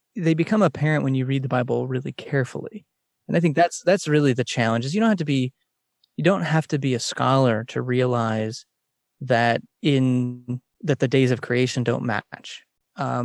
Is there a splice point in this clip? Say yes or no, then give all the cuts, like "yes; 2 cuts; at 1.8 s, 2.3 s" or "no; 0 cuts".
no; 0 cuts